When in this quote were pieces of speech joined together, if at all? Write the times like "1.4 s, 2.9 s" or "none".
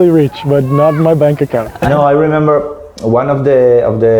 1.8 s